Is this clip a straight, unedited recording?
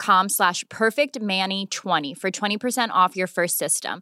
yes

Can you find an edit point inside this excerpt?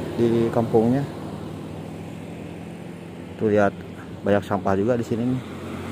no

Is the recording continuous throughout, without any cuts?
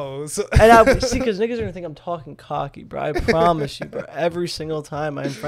yes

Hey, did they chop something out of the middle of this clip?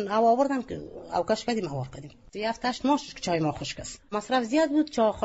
no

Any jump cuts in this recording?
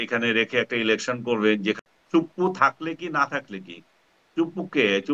yes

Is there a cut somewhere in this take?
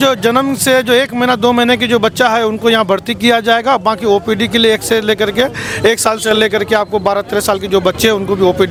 no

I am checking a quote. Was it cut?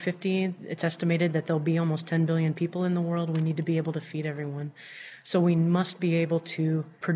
no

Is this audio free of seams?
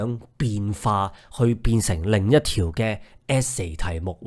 yes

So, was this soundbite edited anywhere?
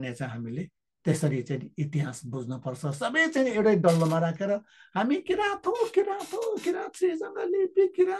no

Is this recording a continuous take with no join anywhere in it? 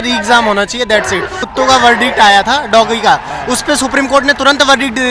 no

